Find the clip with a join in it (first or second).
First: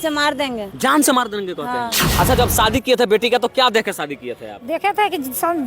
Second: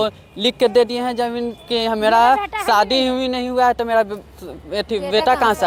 first